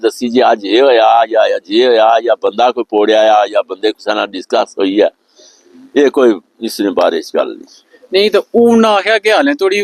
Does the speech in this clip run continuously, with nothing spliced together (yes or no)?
yes